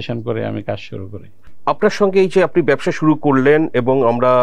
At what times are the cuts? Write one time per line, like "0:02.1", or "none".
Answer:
none